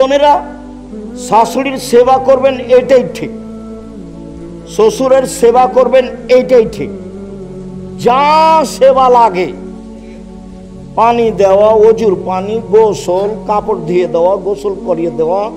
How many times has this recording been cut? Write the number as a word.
two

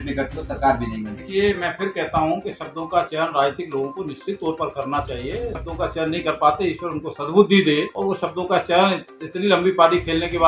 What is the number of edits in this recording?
three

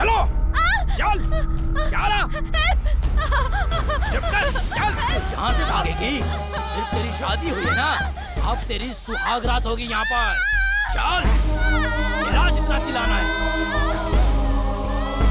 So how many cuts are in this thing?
one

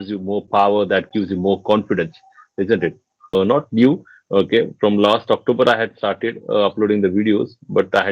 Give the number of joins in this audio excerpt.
one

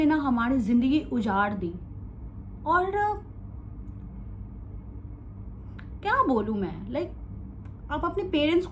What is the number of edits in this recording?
zero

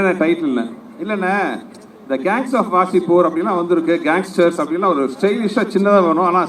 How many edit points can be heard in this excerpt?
zero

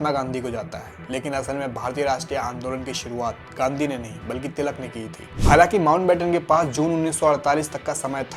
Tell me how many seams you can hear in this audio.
one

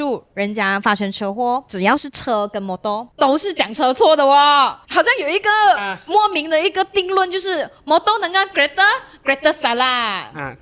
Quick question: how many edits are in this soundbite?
zero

